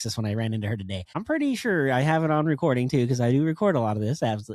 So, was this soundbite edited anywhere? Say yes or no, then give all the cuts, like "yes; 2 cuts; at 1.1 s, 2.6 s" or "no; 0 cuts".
yes; 1 cut; at 1.1 s